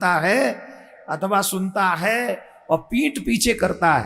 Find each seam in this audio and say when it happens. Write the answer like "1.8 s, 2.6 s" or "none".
none